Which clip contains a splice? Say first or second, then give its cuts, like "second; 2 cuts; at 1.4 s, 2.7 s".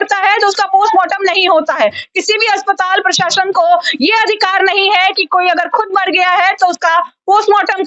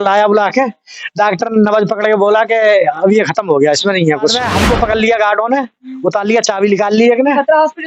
second; 1 cut; at 4.4 s